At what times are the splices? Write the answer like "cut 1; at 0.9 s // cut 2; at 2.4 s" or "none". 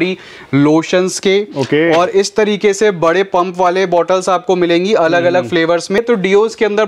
cut 1; at 6.0 s